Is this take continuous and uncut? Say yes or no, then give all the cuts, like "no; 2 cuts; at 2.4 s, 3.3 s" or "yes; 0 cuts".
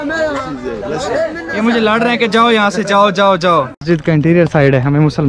no; 1 cut; at 3.8 s